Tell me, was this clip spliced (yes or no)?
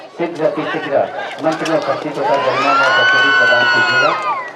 no